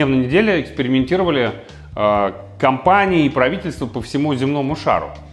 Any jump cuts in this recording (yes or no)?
no